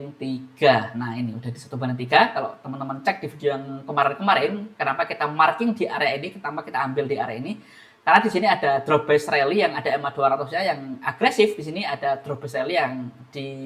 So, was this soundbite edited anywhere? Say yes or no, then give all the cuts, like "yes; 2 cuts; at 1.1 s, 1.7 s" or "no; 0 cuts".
no; 0 cuts